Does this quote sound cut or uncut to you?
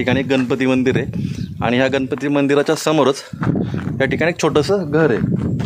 uncut